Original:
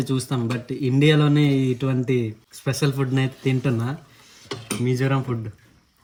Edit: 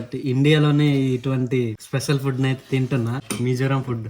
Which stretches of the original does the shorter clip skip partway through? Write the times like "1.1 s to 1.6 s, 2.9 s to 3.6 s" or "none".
2.4 s to 2.6 s, 4.0 s to 4.7 s

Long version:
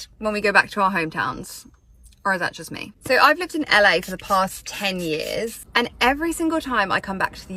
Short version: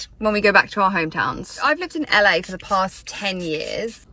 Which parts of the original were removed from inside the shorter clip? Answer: 1.6 s to 3.2 s

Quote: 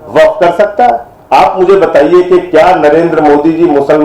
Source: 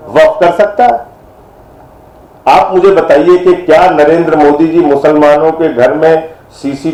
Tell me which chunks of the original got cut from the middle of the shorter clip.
1.1 s to 2.3 s

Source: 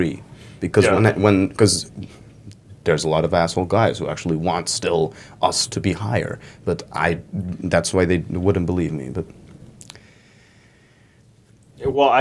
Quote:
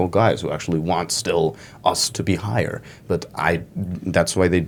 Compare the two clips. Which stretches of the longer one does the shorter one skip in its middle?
none

